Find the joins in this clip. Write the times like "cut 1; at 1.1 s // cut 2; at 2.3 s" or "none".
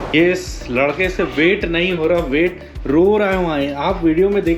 none